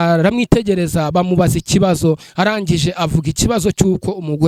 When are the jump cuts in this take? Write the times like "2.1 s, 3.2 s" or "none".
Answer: none